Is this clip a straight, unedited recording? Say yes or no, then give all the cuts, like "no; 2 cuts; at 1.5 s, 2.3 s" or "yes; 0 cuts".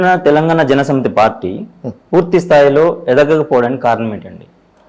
yes; 0 cuts